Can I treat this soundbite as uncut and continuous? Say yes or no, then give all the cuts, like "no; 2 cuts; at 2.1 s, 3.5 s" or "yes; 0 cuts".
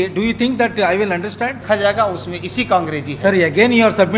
no; 1 cut; at 1.6 s